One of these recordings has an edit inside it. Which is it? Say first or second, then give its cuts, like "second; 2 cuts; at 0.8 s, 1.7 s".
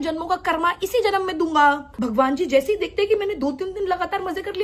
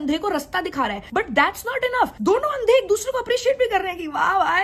first; 1 cut; at 1.9 s